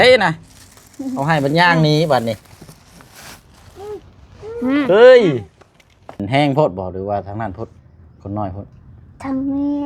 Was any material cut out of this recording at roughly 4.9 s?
no; 1 cut; at 6.2 s

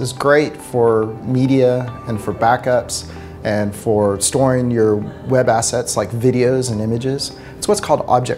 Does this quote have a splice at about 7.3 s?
no; 0 cuts

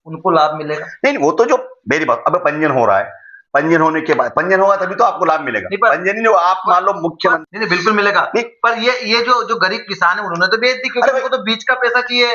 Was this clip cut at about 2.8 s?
no; 1 cut; at 7.4 s

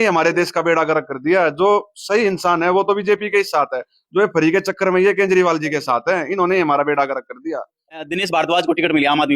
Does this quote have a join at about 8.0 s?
yes; 1 cut; at 8.0 s

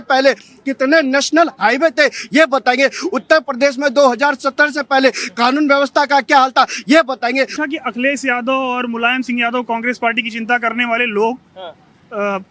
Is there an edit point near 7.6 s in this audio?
yes; 1 cut; at 7.6 s

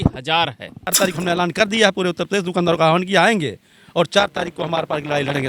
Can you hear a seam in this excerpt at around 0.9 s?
yes; 1 cut; at 0.9 s

